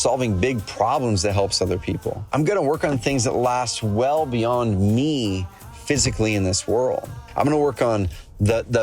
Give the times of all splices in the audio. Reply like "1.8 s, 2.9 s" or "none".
2.3 s, 7.2 s